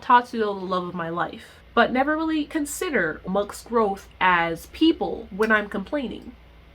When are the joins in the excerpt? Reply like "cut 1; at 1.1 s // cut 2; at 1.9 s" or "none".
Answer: cut 1; at 3.2 s